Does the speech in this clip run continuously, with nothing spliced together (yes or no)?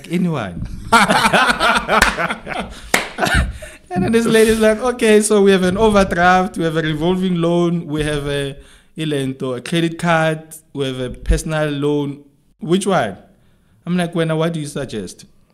yes